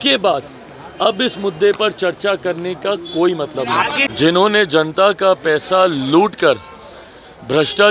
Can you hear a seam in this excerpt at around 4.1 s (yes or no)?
yes